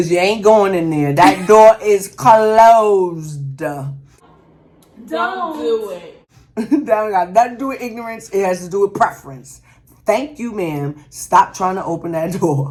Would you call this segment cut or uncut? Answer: uncut